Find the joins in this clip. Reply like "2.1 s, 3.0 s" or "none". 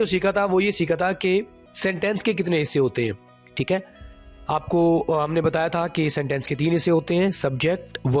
1.6 s